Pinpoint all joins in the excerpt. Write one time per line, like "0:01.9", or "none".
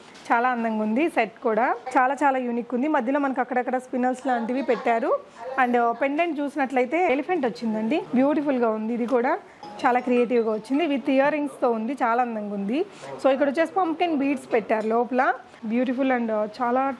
0:01.8
0:09.6
0:15.5